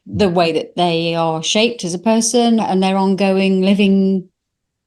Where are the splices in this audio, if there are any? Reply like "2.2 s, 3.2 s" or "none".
2.6 s